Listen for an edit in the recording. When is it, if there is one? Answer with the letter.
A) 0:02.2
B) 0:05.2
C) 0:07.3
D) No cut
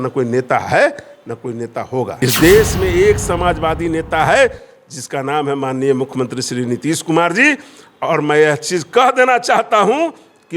A